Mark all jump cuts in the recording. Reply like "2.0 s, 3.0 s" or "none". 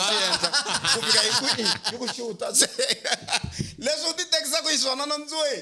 none